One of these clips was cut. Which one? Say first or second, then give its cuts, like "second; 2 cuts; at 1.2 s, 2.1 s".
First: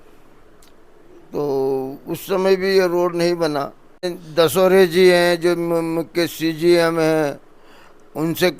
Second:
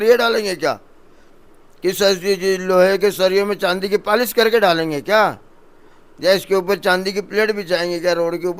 first; 1 cut; at 4.2 s